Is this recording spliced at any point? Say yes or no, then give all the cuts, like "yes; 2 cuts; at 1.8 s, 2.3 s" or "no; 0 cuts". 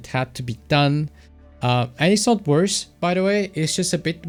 no; 0 cuts